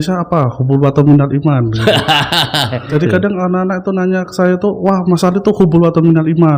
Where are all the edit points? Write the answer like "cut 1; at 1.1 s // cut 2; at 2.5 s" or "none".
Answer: cut 1; at 2.9 s

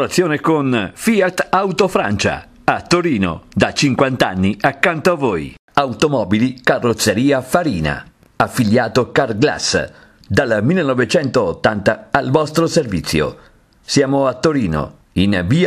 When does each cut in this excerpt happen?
none

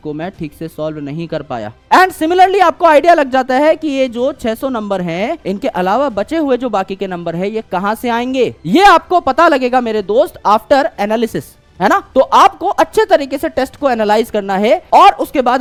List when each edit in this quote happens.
none

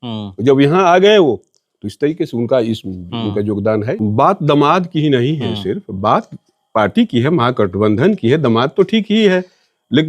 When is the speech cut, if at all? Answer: cut 1; at 4.0 s

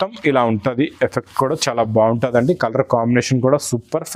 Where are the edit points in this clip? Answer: none

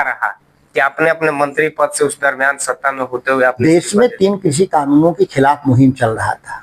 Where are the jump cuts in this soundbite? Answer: none

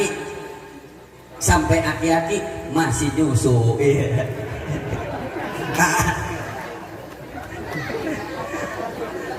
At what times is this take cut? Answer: none

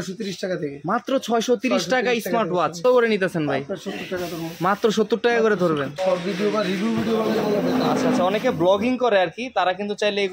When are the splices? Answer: cut 1; at 2.8 s // cut 2; at 6.0 s

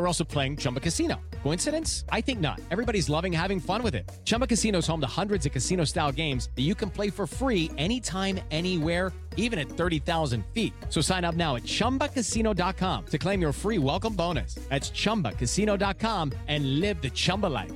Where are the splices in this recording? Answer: none

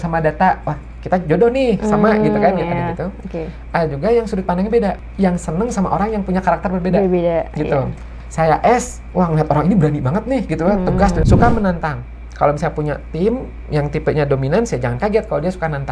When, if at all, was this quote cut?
cut 1; at 5.0 s // cut 2; at 11.2 s

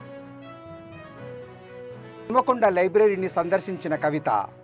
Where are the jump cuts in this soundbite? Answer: cut 1; at 1.1 s // cut 2; at 2.2 s

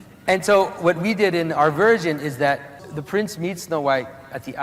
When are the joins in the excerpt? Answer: cut 1; at 2.9 s

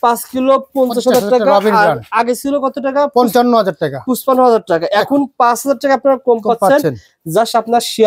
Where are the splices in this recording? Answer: none

